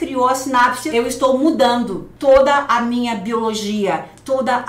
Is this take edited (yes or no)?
yes